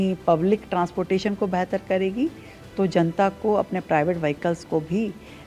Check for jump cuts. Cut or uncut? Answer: uncut